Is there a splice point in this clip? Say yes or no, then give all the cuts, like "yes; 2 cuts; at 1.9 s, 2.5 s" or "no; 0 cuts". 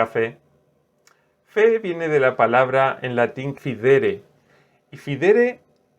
yes; 1 cut; at 3.5 s